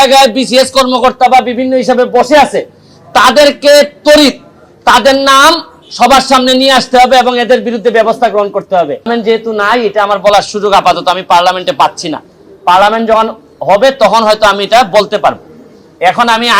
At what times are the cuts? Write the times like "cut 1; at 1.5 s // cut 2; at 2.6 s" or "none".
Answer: cut 1; at 9.1 s